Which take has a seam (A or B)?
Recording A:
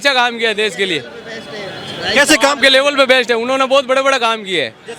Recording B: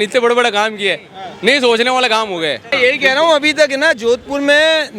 B